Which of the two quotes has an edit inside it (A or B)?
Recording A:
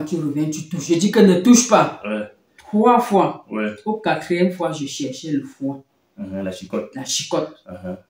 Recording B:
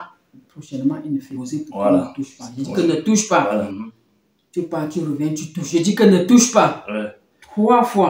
B